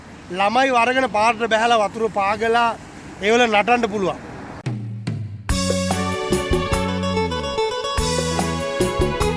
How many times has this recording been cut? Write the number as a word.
one